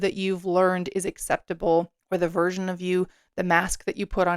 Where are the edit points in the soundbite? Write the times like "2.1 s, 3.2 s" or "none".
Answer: 2.0 s